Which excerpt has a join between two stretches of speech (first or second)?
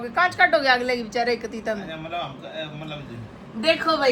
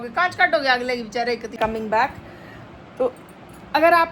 second